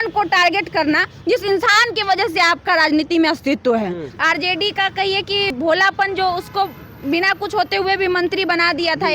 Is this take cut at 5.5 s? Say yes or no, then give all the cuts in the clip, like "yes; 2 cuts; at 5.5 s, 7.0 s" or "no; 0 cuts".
yes; 2 cuts; at 4.1 s, 5.5 s